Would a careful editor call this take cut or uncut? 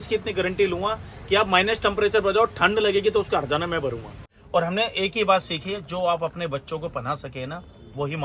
cut